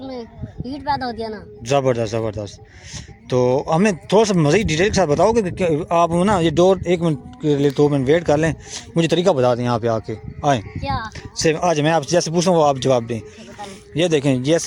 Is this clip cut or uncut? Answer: uncut